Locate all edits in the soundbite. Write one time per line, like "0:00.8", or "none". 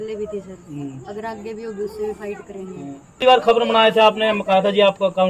0:03.1